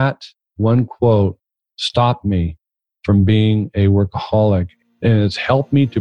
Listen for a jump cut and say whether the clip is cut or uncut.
cut